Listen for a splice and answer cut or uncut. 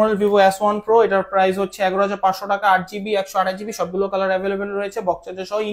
uncut